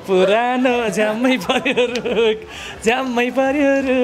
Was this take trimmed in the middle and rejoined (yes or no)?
no